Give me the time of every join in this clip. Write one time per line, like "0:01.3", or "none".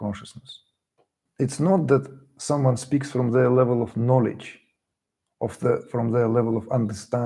0:01.2